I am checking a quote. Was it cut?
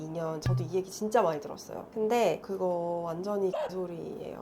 yes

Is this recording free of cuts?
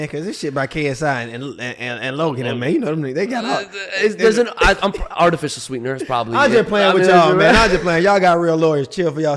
yes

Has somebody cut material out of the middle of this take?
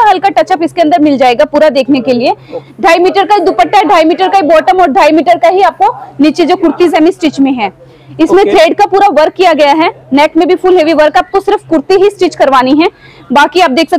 yes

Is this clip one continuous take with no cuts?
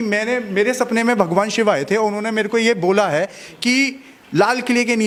yes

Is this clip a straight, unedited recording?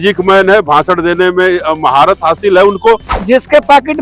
no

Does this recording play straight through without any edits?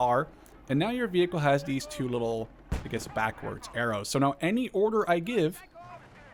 yes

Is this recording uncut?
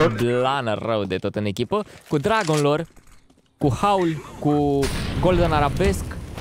yes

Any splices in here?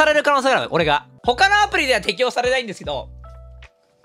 yes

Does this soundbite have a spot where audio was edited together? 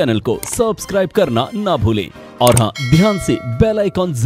no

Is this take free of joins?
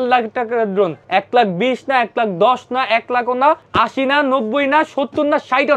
no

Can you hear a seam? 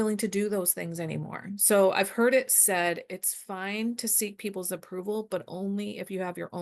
no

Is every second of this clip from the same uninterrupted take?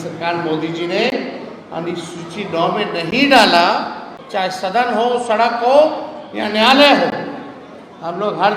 no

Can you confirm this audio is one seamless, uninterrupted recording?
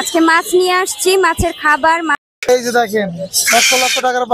no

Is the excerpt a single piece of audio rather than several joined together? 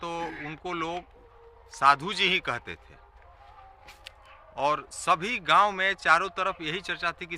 yes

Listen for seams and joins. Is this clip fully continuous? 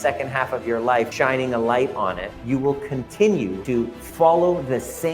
no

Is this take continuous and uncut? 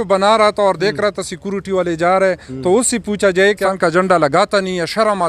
no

